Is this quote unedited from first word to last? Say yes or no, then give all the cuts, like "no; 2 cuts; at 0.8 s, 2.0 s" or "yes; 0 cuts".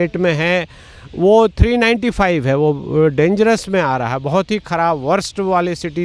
yes; 0 cuts